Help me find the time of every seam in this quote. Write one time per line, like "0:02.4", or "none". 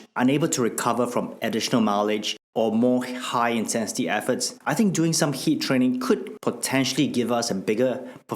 0:02.4